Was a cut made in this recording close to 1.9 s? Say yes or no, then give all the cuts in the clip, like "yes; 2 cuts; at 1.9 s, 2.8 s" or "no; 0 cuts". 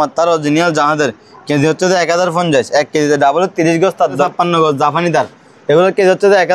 no; 1 cut; at 4.2 s